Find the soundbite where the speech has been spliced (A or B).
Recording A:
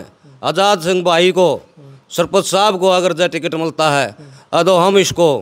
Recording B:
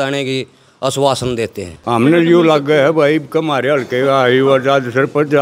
B